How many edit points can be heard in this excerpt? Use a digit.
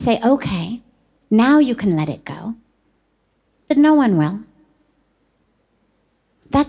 1